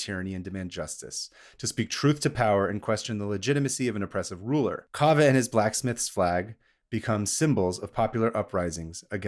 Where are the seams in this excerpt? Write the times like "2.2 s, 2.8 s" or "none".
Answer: none